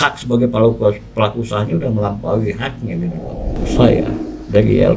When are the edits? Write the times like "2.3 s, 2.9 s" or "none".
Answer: 3.6 s